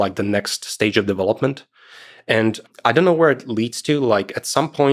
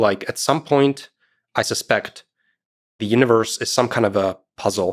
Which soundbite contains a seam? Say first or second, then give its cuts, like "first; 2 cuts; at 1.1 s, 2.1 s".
first; 1 cut; at 2.6 s